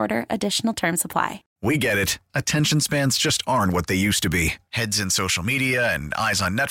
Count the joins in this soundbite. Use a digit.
1